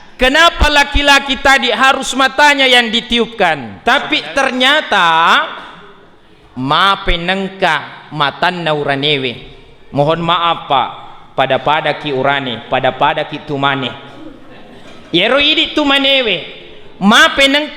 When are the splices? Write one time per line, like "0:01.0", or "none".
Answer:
0:03.7